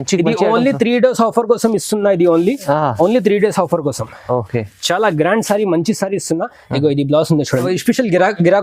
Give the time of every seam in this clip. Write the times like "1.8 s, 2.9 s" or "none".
7.7 s